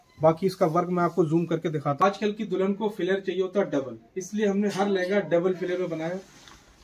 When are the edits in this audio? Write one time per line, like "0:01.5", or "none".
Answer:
0:02.0